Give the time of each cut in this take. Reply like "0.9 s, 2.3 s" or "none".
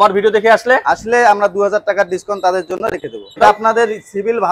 3.4 s